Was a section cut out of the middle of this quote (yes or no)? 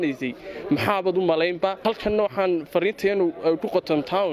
yes